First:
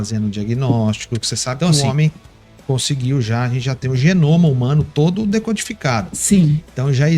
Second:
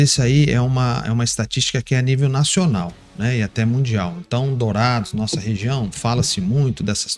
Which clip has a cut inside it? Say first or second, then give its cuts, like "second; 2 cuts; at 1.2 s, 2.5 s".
first; 1 cut; at 1.7 s